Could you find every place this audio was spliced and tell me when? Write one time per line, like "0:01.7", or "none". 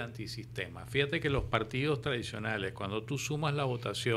none